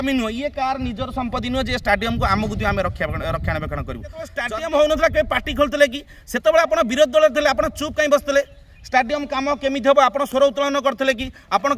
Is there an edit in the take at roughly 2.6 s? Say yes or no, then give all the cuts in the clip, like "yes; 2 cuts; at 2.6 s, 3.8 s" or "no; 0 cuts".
no; 1 cut; at 4.4 s